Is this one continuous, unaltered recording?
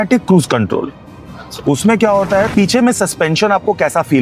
no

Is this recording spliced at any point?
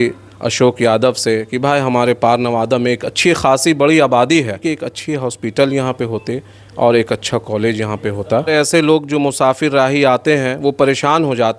yes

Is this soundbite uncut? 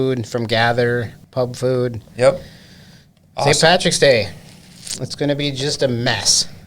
no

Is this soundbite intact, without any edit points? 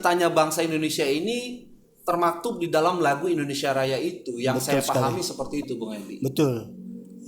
yes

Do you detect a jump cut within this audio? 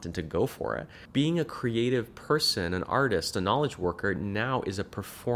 yes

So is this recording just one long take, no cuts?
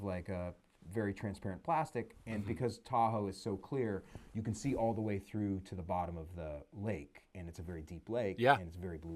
yes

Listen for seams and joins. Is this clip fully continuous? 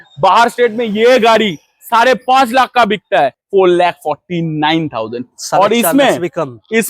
no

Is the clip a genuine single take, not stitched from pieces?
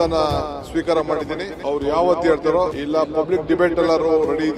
no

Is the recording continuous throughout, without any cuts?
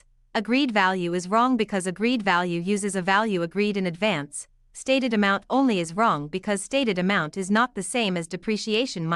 yes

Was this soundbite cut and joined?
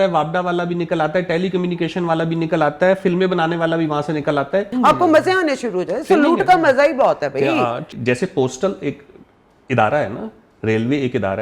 yes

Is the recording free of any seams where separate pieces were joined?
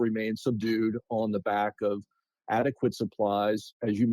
yes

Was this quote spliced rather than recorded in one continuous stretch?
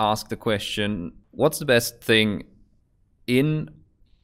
yes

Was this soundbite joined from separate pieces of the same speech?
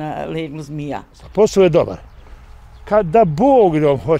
yes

